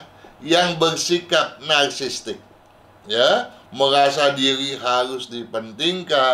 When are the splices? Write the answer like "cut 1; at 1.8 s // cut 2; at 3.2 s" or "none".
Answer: none